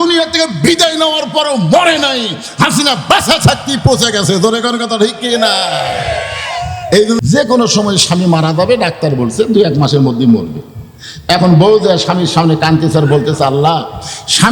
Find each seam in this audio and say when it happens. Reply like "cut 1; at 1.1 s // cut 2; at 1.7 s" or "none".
cut 1; at 7.2 s